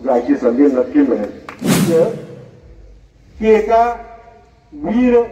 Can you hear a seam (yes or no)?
yes